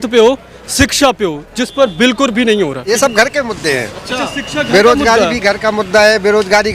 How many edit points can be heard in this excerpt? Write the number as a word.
one